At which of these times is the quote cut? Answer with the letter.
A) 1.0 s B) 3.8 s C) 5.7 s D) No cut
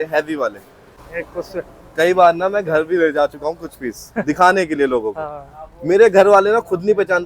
A